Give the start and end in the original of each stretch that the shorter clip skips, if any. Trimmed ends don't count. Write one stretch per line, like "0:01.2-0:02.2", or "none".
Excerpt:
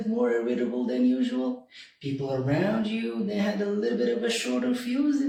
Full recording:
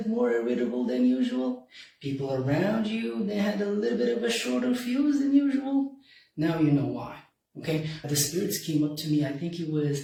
none